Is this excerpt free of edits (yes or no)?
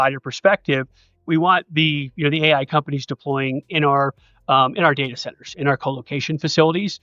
no